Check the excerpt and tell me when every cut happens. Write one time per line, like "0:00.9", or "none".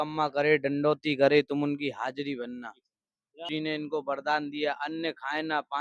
0:03.4